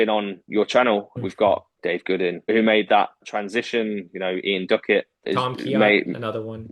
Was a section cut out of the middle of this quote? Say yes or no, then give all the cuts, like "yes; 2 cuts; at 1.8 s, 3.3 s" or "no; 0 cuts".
yes; 2 cuts; at 1.1 s, 5.2 s